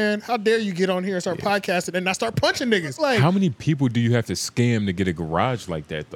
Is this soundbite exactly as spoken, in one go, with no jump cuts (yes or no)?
no